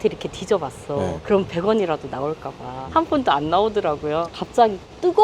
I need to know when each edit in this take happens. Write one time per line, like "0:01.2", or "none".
0:02.8